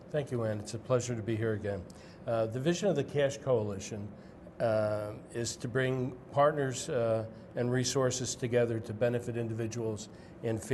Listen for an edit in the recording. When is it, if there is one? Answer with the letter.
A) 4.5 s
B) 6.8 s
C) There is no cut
B